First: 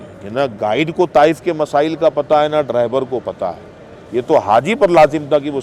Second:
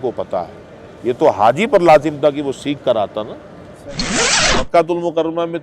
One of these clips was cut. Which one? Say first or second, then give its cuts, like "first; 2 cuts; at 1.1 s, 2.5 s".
second; 1 cut; at 4.1 s